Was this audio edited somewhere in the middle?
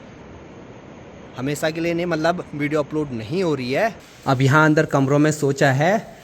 yes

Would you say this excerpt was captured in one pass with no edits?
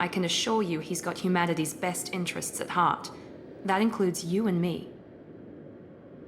no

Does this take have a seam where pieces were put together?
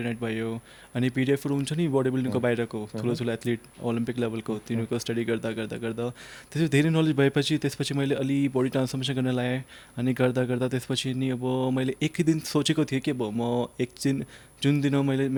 no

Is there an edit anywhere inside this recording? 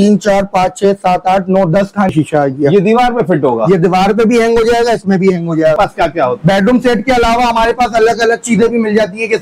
yes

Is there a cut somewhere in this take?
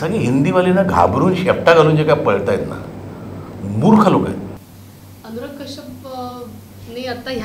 no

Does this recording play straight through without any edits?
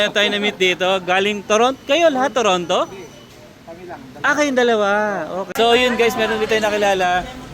no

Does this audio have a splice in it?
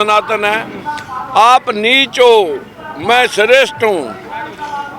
no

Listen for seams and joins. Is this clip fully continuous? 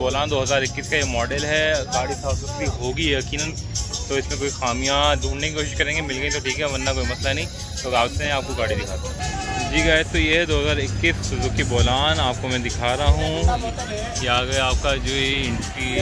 yes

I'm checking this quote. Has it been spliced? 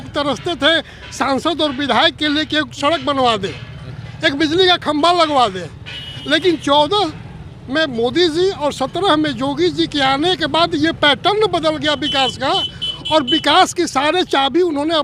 no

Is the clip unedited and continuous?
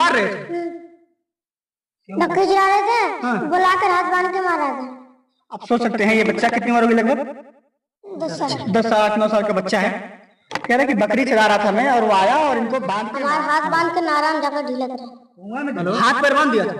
no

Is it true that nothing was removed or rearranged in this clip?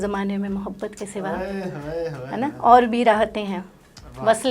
yes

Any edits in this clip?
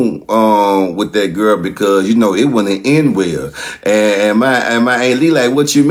no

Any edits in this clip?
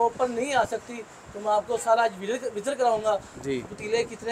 no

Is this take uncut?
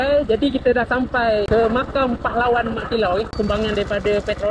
no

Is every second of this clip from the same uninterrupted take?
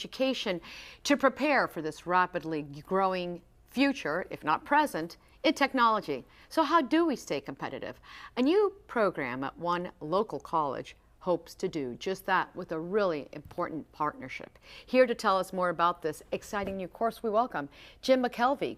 no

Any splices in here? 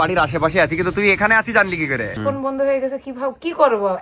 yes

